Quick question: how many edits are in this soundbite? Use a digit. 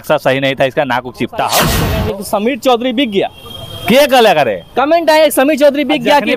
1